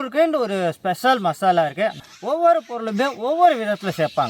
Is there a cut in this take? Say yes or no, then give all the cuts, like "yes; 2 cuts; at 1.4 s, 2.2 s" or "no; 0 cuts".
yes; 1 cut; at 2.0 s